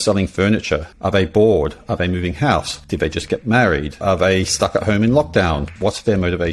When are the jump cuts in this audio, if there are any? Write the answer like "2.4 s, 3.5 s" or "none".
0.9 s, 2.8 s, 4.0 s, 5.7 s